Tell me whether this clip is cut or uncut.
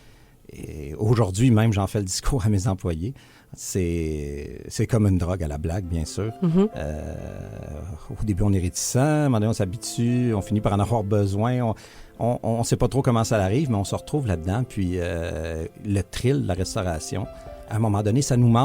cut